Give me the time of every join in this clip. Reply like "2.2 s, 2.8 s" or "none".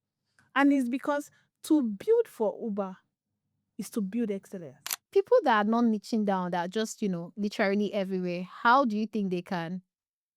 5.0 s